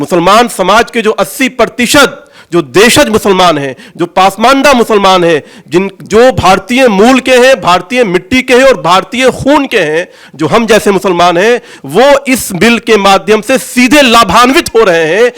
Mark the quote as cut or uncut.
uncut